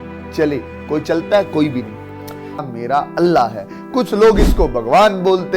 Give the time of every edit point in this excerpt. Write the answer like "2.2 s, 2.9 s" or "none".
2.6 s